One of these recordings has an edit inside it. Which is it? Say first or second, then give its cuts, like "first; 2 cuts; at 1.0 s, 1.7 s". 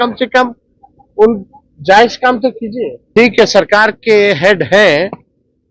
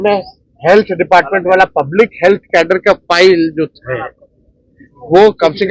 first; 1 cut; at 3.0 s